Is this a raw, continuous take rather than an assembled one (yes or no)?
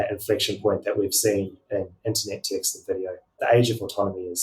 no